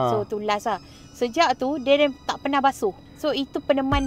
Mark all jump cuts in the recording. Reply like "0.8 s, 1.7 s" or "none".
3.1 s

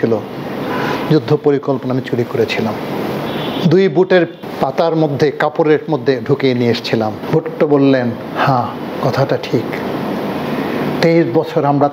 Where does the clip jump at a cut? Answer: 3.3 s, 4.4 s, 7.2 s

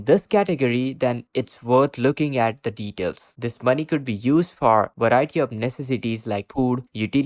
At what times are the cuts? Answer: 3.3 s

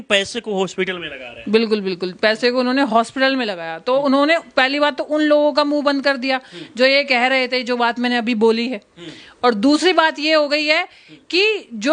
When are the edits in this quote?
none

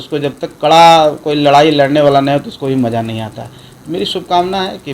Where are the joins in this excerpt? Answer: none

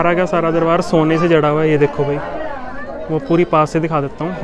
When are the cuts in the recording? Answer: none

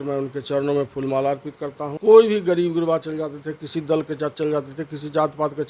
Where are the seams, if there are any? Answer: 1.9 s

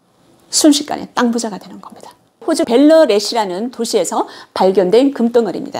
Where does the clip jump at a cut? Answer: 2.4 s

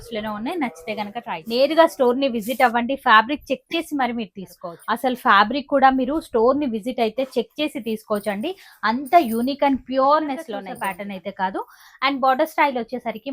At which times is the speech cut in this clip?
1.2 s, 4.6 s, 10.7 s

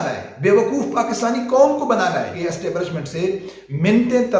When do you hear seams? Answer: 2.3 s

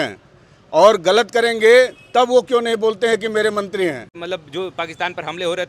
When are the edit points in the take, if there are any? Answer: 4.2 s

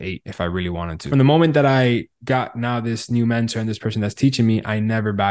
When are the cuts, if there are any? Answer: 1.1 s

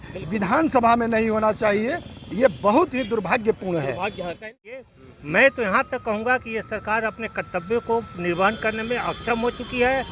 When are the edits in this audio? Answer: 4.8 s

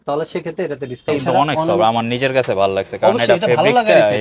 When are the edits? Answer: 1.0 s

